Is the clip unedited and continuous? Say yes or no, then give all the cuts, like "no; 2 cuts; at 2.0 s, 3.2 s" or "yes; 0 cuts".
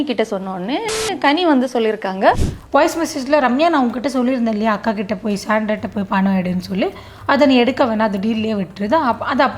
no; 1 cut; at 2.4 s